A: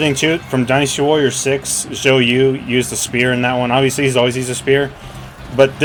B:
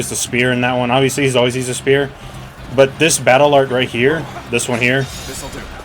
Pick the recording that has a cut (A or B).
B